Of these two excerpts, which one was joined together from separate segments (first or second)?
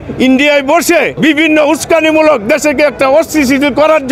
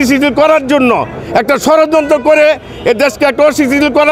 first